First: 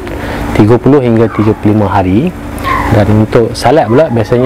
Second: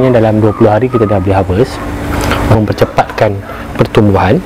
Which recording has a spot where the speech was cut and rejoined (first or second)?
second